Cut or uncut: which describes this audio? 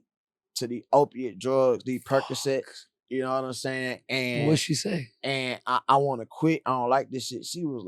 uncut